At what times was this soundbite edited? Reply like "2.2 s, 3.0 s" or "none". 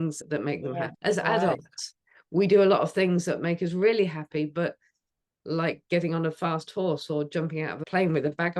0.9 s